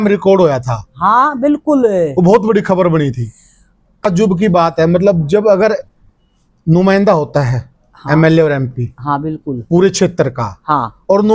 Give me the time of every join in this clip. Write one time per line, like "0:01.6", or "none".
0:04.0

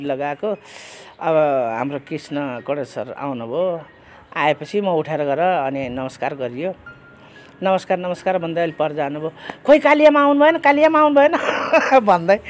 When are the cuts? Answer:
none

